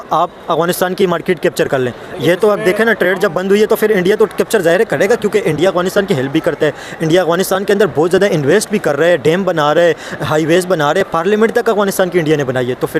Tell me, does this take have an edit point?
no; 0 cuts

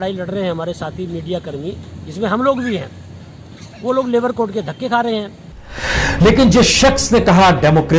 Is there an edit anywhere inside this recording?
yes; 1 cut; at 5.8 s

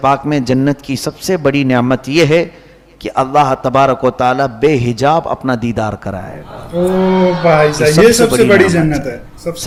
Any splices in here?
no; 0 cuts

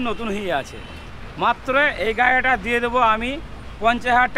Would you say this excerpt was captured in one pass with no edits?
yes; 0 cuts

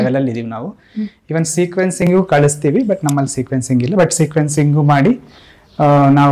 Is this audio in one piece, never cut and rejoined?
yes; 0 cuts

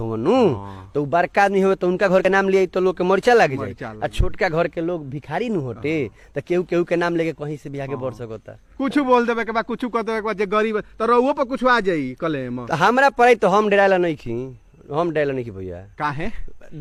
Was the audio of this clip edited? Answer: no; 0 cuts

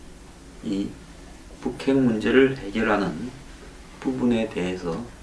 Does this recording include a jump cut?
no; 0 cuts

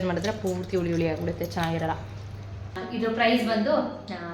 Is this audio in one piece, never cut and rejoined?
no; 1 cut; at 2.8 s

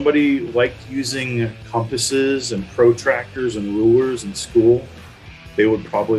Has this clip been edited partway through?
no; 0 cuts

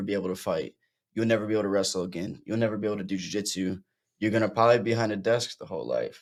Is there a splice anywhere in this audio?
no; 0 cuts

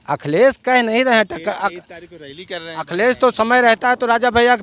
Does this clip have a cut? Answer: no; 0 cuts

